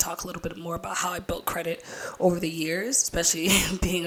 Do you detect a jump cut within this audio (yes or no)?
no